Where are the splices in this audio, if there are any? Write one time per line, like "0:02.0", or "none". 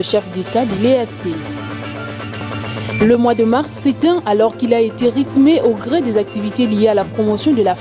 none